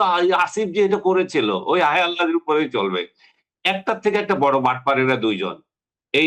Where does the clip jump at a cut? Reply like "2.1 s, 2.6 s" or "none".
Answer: none